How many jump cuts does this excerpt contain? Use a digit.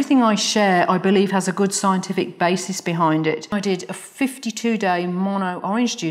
1